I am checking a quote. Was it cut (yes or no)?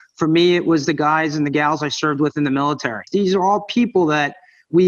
yes